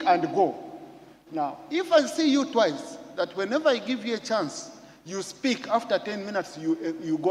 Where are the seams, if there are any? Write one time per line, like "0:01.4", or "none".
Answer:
none